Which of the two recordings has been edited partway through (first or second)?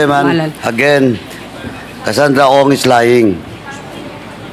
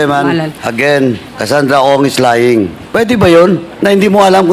second